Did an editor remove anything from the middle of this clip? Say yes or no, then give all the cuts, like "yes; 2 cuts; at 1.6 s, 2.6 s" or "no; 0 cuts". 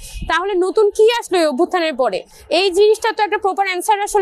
no; 0 cuts